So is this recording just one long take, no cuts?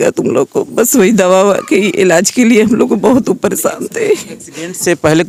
yes; 0 cuts

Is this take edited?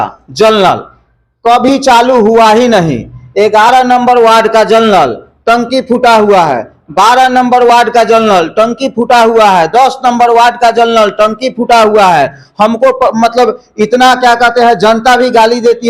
no; 0 cuts

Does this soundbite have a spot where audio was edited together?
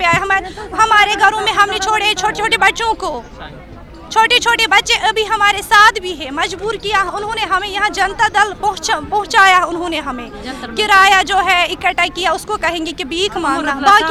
no; 0 cuts

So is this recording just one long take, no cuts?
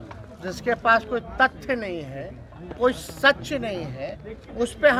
yes; 0 cuts

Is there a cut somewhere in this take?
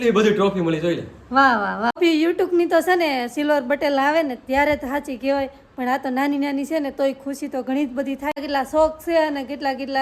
yes; 2 cuts; at 1.9 s, 8.4 s

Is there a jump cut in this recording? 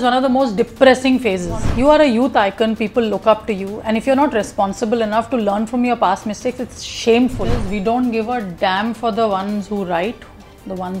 yes; 2 cuts; at 1.7 s, 7.5 s

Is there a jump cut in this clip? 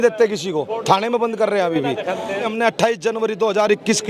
yes; 1 cut; at 2.5 s

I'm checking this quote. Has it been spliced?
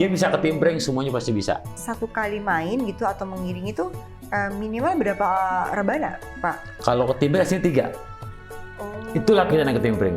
yes; 1 cut; at 1.8 s

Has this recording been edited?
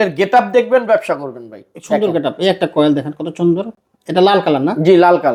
no; 0 cuts

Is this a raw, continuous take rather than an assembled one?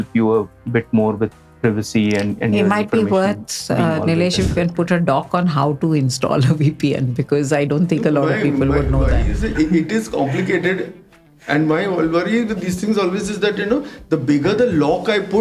yes; 0 cuts

